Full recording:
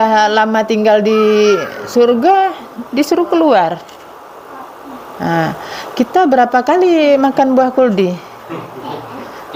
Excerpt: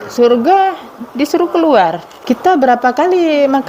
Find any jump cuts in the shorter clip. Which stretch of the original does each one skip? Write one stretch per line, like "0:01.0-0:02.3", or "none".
0:03.9-0:05.8